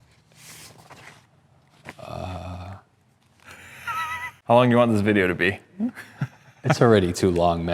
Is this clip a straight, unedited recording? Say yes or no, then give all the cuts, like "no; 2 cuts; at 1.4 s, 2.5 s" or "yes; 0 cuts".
no; 1 cut; at 4.4 s